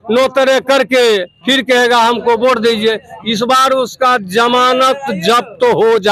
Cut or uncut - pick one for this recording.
uncut